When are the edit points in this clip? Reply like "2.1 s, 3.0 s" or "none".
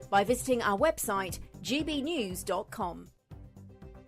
3.1 s